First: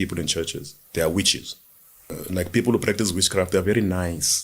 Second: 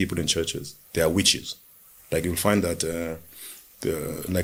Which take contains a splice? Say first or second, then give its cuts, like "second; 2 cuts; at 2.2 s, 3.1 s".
first; 1 cut; at 2.1 s